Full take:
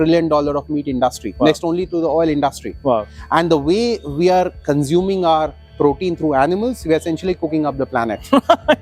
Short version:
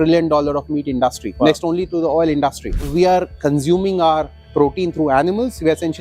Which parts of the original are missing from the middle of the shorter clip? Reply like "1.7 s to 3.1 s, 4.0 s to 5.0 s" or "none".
2.8 s to 4.0 s

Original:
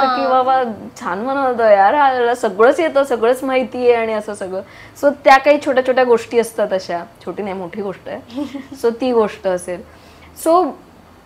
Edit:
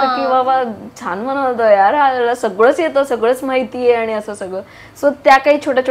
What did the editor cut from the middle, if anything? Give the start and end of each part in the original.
none

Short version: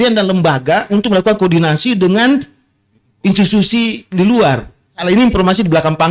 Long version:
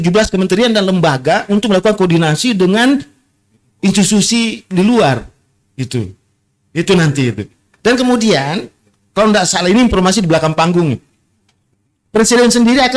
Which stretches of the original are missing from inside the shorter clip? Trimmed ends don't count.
5.6 s to 9.5 s

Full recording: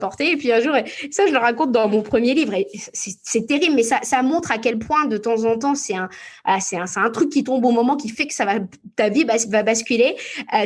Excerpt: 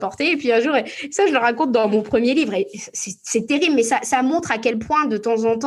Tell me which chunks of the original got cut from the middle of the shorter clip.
none

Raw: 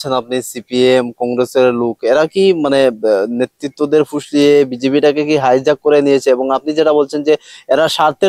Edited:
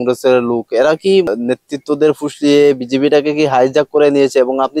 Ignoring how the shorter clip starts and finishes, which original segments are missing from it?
2.6 s to 3.2 s

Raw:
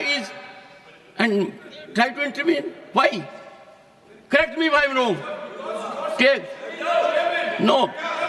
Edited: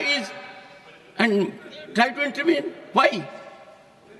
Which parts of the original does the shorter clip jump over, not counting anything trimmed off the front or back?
none

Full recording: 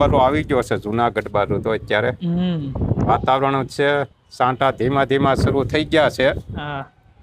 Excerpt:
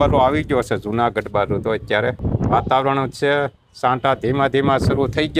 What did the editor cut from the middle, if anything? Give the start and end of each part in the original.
2.2 s to 2.8 s

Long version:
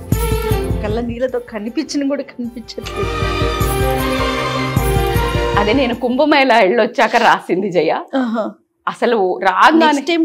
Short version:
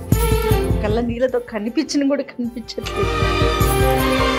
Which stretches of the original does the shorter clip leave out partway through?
none

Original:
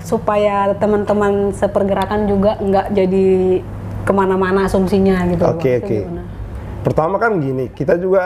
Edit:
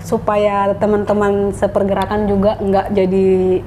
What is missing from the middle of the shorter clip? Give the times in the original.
none

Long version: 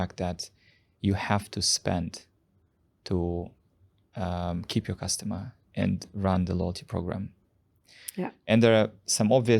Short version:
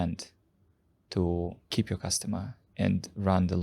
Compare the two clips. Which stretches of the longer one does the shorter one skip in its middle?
3.6 s to 4.7 s

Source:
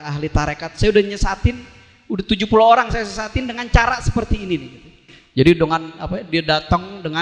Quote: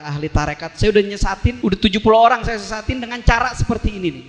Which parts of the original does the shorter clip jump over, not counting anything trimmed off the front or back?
1.5 s to 1.9 s

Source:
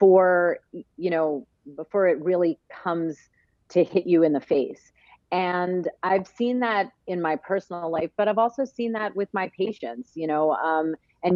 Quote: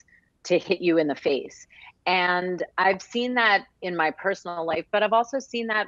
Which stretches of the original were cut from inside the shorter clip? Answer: none

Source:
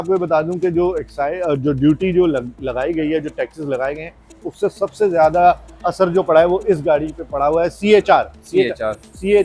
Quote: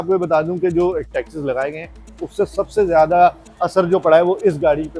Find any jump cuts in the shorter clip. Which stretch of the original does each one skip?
1.1 s to 3.3 s

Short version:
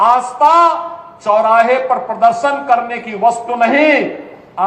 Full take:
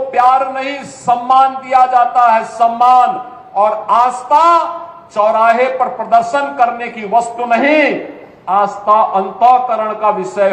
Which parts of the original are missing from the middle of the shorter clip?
none

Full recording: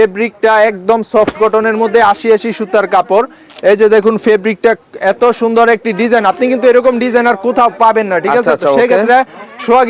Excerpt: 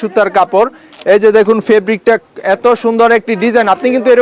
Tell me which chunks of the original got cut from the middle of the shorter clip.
none

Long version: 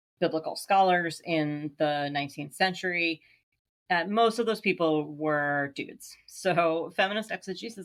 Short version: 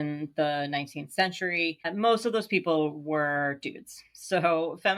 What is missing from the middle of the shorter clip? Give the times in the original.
3.3 s to 4.0 s

